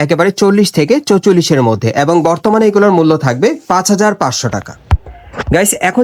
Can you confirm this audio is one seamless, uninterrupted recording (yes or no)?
yes